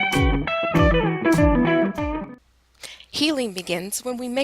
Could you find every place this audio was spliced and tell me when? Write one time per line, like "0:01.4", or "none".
0:02.2